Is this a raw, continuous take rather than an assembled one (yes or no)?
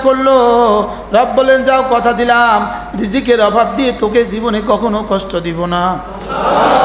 yes